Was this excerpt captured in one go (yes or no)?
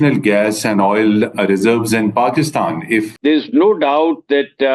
no